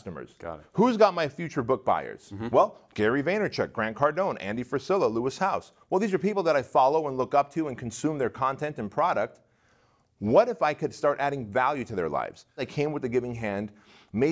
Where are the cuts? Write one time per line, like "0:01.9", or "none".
0:02.8
0:12.6